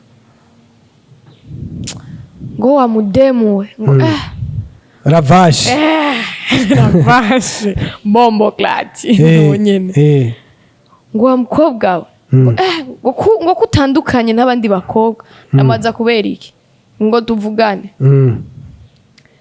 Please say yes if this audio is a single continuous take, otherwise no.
yes